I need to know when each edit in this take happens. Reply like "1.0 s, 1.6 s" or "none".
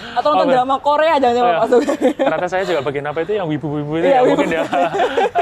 none